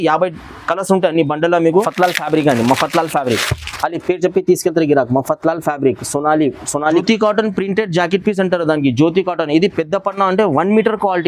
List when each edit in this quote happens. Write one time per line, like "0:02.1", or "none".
0:01.9
0:07.0